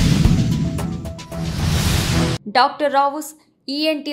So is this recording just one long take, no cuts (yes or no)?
no